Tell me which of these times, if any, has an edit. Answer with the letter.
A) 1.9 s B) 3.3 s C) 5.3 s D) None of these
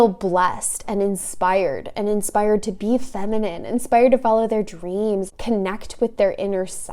C